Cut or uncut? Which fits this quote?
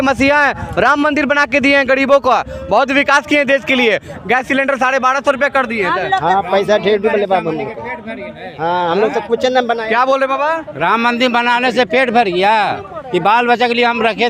uncut